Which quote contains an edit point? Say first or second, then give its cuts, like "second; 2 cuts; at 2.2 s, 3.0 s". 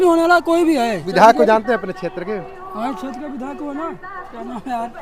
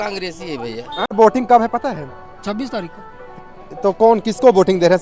second; 1 cut; at 1.1 s